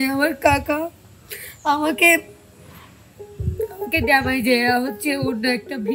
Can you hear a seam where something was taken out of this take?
no; 0 cuts

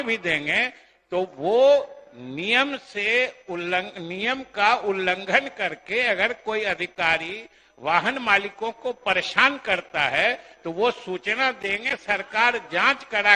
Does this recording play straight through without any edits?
yes; 0 cuts

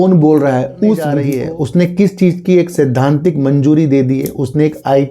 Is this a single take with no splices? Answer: no; 1 cut; at 1.2 s

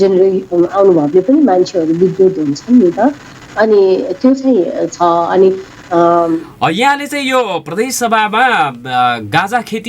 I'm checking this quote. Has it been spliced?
yes; 1 cut; at 6.4 s

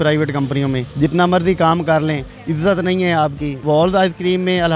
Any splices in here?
yes; 2 cuts; at 0.9 s, 3.6 s

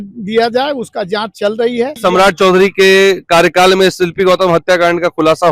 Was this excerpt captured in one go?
no; 1 cut; at 2.0 s

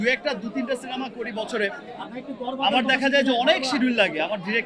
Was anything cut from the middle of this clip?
no; 0 cuts

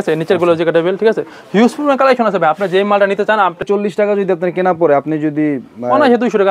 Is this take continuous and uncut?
no; 1 cut; at 3.6 s

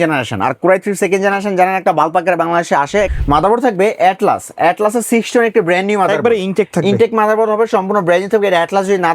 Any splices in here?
yes; 1 cut; at 3.1 s

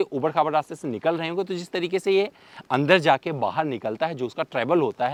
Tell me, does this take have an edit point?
no; 0 cuts

